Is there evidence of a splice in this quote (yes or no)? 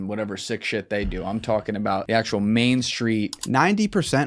yes